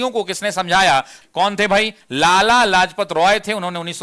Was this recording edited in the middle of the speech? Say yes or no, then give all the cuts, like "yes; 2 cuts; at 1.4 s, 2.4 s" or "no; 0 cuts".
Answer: yes; 1 cut; at 1.2 s